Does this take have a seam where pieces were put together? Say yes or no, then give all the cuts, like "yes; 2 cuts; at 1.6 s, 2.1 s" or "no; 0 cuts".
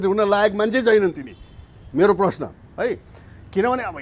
no; 0 cuts